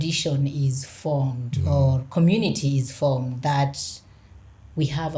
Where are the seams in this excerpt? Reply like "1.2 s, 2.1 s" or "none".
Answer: none